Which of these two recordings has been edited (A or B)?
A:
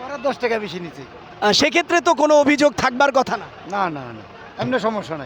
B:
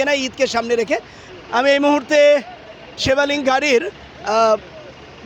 B